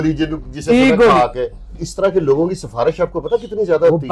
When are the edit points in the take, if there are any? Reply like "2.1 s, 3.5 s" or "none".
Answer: 1.7 s